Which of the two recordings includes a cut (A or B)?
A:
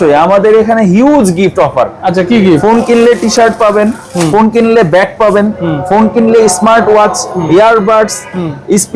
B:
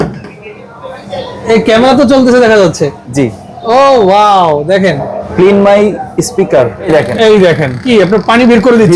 B